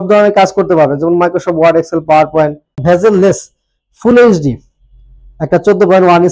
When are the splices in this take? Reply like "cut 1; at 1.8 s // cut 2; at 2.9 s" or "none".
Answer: cut 1; at 2.8 s

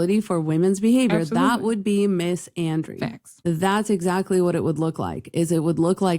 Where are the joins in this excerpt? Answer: cut 1; at 3.3 s

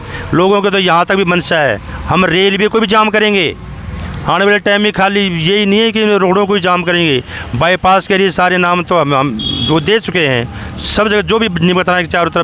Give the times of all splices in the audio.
none

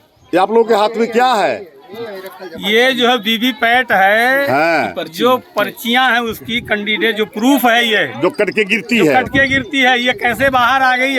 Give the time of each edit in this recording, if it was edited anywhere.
none

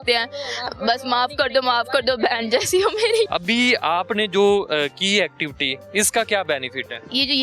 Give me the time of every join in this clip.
cut 1; at 3.3 s

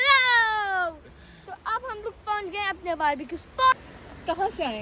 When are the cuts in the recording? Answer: cut 1; at 3.9 s

